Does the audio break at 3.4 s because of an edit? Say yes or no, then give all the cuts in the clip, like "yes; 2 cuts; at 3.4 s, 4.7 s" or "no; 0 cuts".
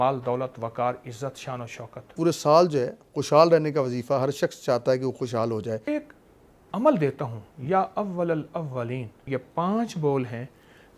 no; 3 cuts; at 2.1 s, 5.9 s, 9.2 s